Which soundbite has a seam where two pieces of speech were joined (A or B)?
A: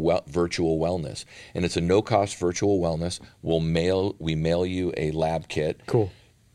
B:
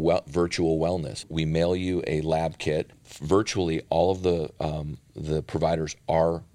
B